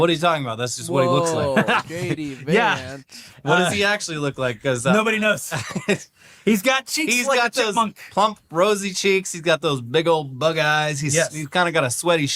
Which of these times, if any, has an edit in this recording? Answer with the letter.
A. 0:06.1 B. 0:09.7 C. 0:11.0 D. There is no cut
D